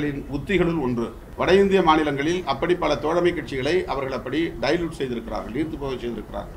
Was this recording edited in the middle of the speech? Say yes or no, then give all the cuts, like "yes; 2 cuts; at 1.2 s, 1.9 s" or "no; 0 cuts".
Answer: yes; 1 cut; at 1.2 s